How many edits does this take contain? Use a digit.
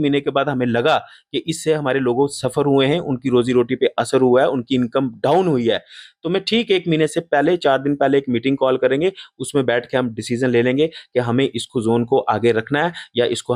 0